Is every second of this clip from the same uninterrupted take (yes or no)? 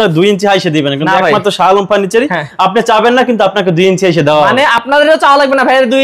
yes